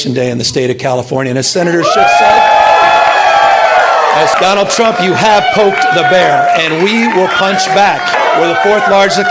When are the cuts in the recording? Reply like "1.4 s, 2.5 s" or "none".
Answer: 4.4 s, 8.1 s